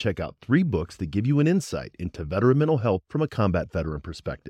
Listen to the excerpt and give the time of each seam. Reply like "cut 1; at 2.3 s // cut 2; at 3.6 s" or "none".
none